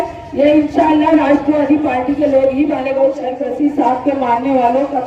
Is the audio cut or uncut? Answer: cut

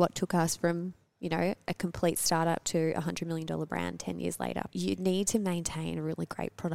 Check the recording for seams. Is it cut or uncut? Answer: cut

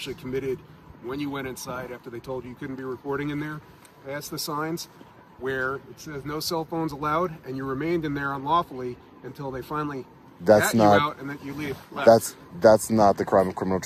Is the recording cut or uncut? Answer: uncut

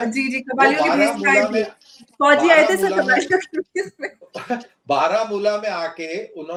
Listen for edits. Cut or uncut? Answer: uncut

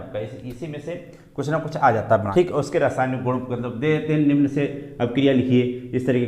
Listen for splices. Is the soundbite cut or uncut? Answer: cut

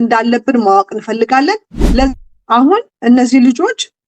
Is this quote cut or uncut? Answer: cut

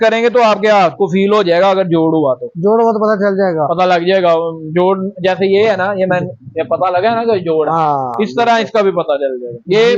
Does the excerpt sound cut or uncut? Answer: uncut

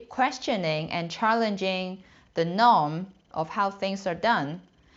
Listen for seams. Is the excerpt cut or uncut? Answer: uncut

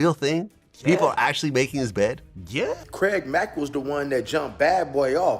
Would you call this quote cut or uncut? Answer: cut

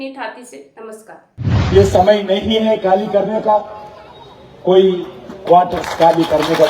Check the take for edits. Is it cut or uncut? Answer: cut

